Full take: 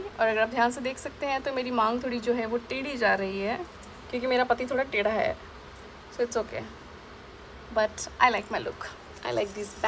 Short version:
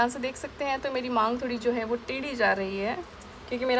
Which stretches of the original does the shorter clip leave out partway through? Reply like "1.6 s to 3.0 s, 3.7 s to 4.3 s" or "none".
none

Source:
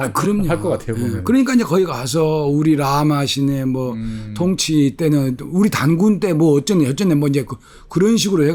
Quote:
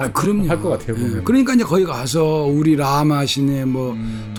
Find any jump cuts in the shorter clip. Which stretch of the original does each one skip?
none

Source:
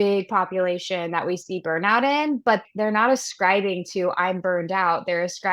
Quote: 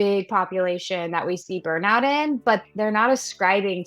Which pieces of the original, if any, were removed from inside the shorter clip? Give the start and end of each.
none

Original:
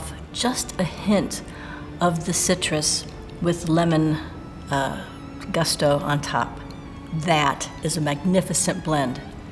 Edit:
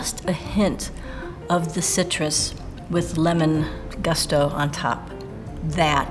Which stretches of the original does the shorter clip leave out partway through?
4.4 s to 5.3 s

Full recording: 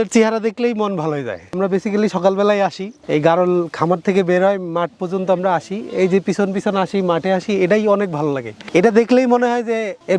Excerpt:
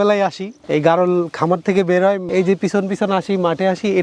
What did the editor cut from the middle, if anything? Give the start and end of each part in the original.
4.6 s to 5.9 s

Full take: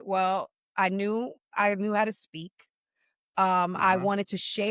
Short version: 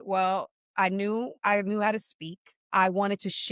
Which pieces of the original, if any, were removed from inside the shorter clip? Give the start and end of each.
1.3 s to 1.5 s, 2.8 s to 3.8 s

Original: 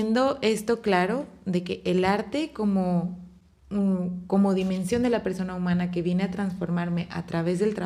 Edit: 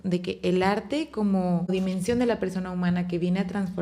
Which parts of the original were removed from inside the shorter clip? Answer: 3.1 s to 4.5 s

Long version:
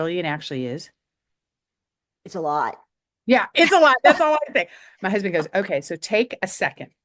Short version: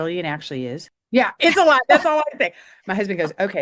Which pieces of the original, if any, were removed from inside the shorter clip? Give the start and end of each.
0.9 s to 3.1 s

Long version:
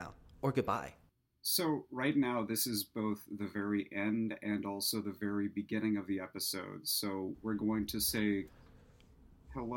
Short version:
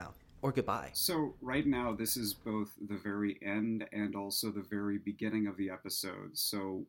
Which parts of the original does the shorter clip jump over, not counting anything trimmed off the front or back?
0.9 s to 1.4 s

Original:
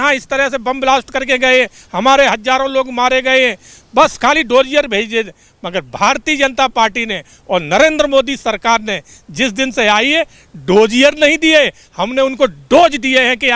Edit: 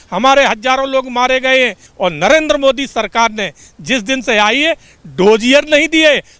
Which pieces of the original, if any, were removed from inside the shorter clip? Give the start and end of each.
3.7 s to 7.3 s

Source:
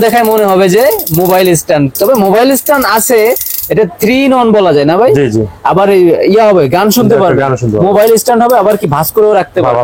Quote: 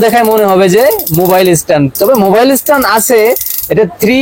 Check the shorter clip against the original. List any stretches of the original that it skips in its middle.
none

